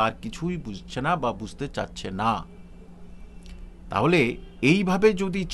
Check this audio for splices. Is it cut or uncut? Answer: uncut